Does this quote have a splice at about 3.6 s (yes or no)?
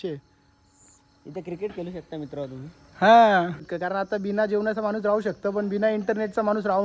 yes